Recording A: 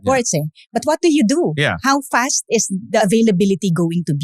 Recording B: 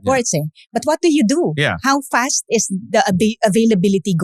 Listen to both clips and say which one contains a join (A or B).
A